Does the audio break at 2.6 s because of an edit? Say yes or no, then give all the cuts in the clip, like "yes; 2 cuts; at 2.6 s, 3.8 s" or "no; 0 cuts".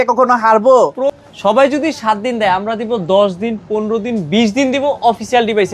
no; 1 cut; at 1.1 s